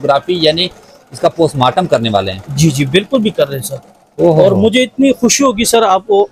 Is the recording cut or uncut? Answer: uncut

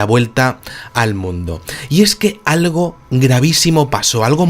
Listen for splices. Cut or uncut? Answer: cut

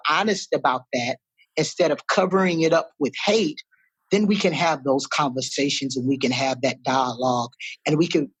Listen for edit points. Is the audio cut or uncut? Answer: uncut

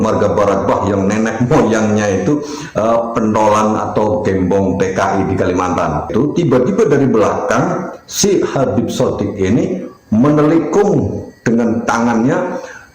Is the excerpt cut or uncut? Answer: cut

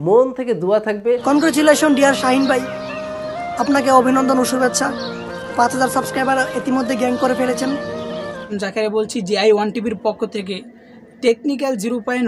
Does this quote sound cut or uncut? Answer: cut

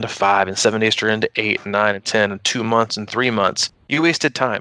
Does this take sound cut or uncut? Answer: cut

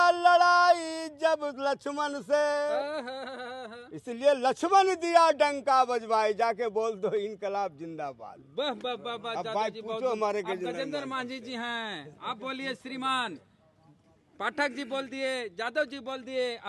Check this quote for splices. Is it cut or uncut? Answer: uncut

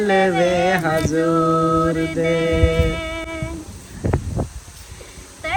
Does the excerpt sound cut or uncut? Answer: uncut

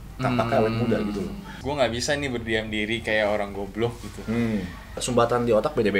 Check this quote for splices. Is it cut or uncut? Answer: cut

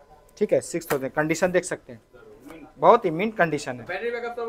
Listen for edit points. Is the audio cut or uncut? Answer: uncut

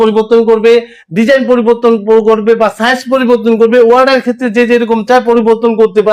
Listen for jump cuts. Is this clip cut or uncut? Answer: uncut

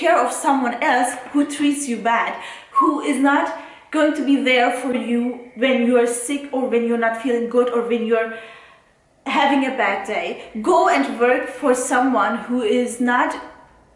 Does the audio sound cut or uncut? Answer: cut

